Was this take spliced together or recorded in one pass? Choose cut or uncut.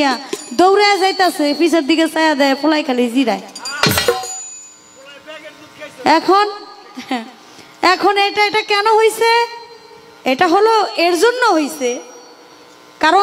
uncut